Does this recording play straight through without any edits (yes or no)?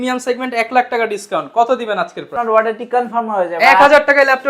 no